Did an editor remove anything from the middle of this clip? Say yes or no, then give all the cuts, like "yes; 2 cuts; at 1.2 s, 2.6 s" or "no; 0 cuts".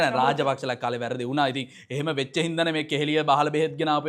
no; 0 cuts